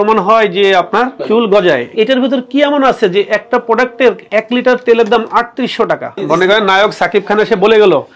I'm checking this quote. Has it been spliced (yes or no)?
yes